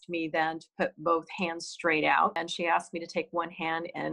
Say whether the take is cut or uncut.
cut